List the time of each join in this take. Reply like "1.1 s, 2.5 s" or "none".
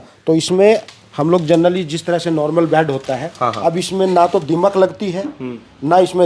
none

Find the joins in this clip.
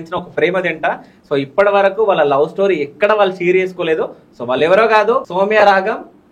5.3 s

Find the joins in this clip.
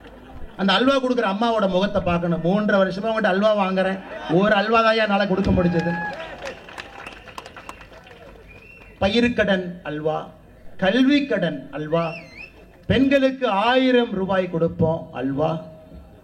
none

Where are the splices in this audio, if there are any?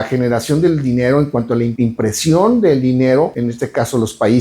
1.7 s, 3.3 s

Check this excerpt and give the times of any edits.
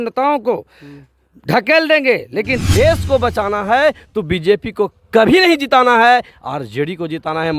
2.5 s

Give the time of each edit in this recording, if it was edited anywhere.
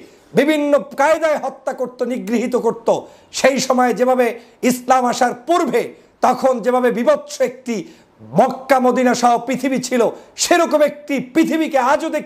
none

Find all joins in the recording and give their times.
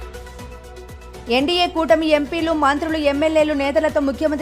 1.2 s

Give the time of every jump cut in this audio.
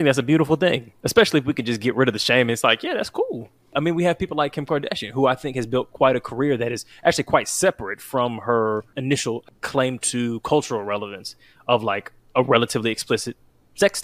0.9 s, 3.7 s, 9.1 s

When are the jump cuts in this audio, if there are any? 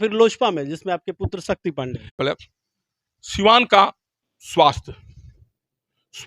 2.1 s

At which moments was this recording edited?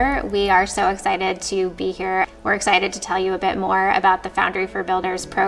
2.3 s

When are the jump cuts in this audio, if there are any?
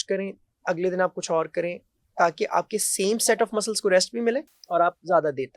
4.6 s

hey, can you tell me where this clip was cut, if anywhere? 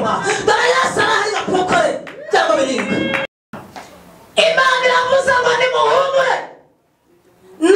3.4 s

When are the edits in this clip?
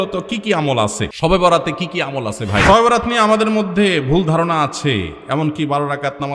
1.1 s, 2.6 s

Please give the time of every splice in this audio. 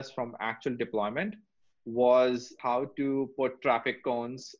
2.5 s

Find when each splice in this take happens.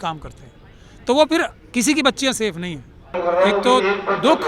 3.2 s

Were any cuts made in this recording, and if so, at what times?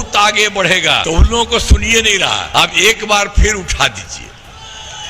1.0 s, 2.4 s

